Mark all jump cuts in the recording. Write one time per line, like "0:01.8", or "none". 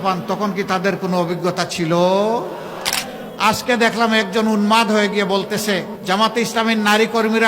0:02.9
0:05.9